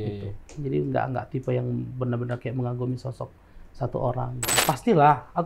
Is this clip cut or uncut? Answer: cut